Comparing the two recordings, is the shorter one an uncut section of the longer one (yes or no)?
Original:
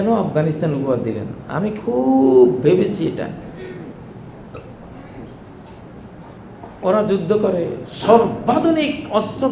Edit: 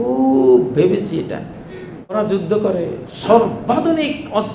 no